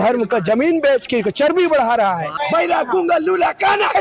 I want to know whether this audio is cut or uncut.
cut